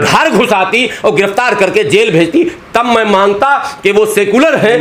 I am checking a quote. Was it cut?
no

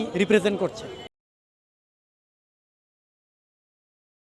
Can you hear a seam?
no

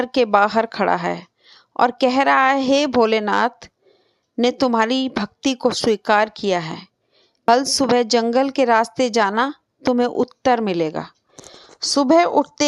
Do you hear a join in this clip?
yes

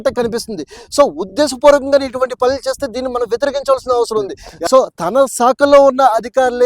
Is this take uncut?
no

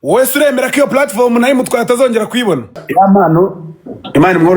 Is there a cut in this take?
yes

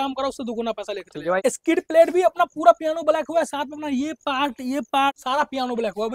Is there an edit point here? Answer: yes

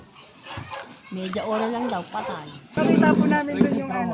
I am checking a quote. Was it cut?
yes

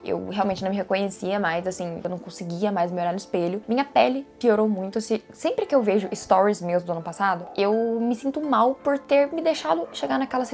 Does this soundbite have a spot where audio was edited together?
yes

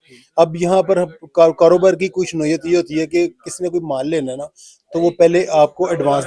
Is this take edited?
no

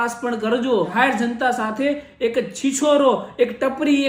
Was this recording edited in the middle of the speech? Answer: yes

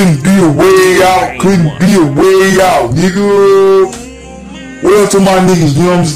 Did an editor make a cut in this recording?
no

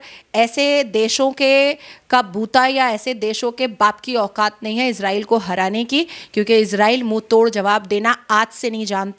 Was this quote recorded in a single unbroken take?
yes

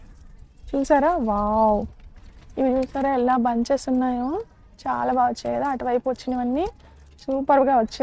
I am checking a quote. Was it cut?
no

